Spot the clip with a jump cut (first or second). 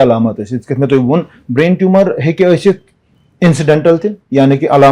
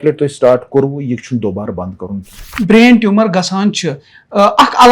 second